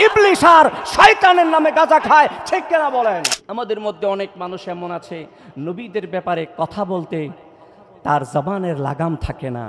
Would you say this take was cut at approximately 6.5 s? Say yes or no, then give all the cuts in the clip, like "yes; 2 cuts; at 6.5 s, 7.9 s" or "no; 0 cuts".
no; 1 cut; at 3.3 s